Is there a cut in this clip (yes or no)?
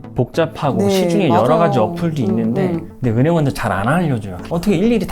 yes